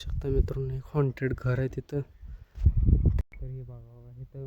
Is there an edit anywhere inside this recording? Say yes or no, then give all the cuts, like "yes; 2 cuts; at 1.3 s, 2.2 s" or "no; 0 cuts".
yes; 1 cut; at 3.2 s